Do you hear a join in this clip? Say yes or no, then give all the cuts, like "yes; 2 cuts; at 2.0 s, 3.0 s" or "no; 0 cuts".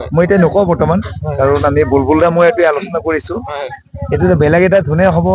no; 0 cuts